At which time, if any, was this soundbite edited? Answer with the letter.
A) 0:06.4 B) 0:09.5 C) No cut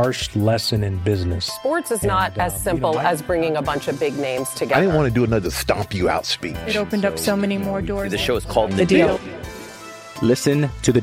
C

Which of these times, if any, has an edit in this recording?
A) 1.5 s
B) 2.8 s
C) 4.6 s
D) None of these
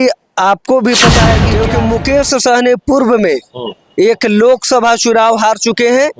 A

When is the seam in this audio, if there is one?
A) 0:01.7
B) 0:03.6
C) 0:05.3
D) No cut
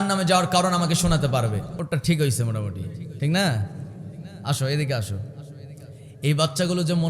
A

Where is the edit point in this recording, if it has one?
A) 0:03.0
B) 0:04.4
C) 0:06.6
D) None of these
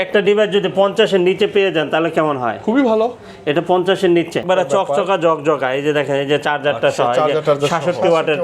B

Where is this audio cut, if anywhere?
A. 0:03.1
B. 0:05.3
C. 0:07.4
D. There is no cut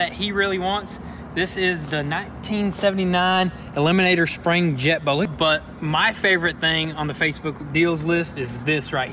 B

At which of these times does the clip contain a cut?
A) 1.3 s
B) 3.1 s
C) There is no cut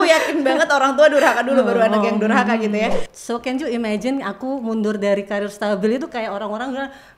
B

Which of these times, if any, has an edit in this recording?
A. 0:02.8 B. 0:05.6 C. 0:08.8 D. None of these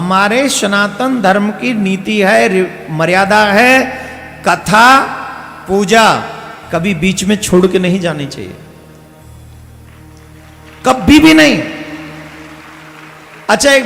D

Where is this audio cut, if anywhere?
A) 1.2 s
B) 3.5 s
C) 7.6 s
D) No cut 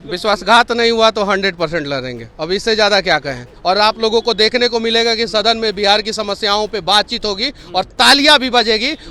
B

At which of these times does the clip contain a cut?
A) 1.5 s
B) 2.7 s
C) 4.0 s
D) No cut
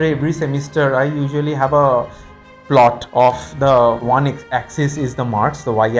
C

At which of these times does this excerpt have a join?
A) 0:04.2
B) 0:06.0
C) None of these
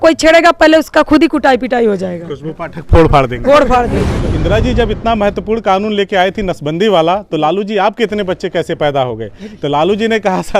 A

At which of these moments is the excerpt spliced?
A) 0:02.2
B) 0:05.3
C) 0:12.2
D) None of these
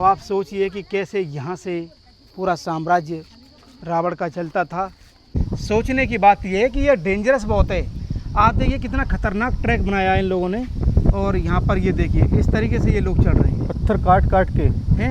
B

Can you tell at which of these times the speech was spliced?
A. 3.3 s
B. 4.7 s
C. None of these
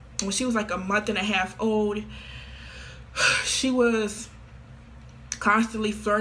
C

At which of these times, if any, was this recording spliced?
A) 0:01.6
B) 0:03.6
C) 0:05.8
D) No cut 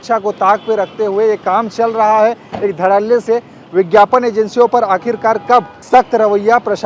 C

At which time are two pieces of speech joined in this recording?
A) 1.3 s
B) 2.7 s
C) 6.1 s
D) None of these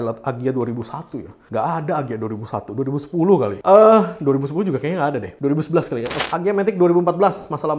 C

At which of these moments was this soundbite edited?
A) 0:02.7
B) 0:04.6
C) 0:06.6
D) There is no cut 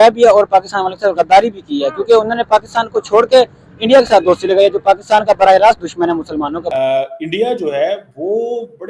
C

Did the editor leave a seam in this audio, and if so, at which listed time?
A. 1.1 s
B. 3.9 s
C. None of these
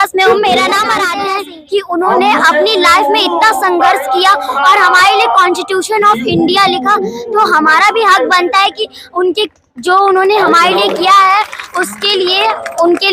A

